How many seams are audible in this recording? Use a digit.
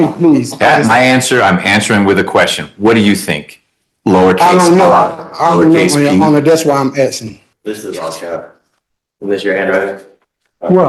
1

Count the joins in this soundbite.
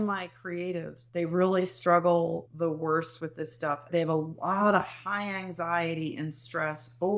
2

